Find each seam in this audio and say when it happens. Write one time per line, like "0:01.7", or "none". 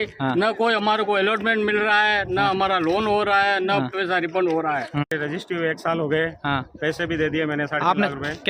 0:05.1